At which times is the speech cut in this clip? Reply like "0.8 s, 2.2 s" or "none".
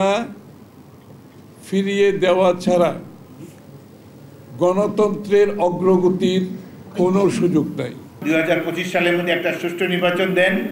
8.1 s